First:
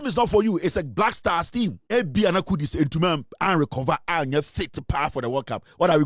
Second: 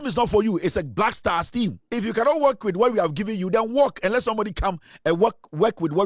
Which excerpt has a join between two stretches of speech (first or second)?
first